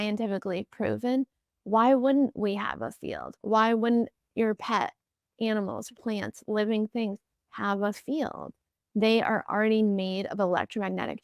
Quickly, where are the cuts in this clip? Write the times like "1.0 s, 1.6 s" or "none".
none

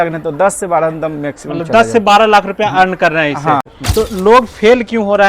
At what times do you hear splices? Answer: 3.8 s

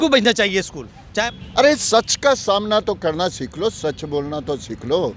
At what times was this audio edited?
1.2 s

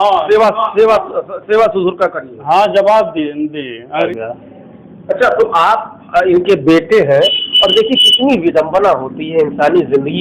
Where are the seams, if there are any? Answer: 4.1 s

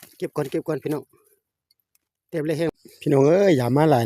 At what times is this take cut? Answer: 2.7 s

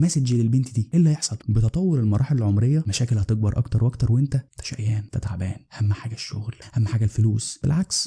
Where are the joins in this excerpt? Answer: none

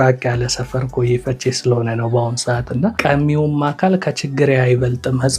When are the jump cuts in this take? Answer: 3.0 s

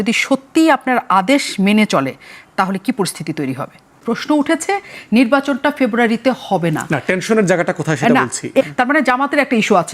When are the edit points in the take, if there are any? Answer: 4.0 s

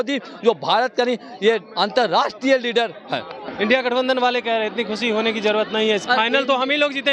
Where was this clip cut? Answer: 3.4 s

